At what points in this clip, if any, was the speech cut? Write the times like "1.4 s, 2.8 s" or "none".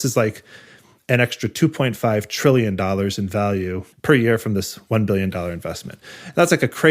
3.9 s